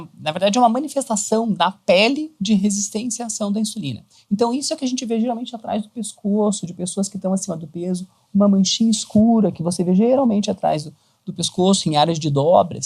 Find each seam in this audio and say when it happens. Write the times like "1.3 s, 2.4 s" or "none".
none